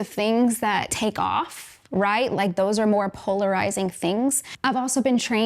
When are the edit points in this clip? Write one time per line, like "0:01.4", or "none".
0:00.9
0:04.5